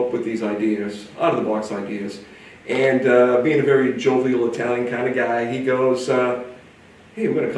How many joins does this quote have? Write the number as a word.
zero